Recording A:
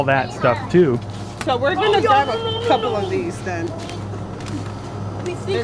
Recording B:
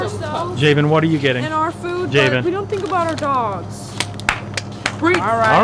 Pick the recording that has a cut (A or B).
A